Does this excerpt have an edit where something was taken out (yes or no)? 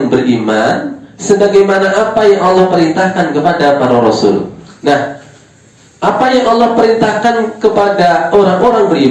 yes